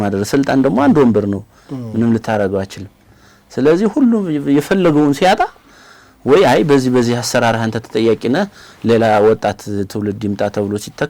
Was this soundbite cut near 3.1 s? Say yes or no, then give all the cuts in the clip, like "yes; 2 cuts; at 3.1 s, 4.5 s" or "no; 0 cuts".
no; 0 cuts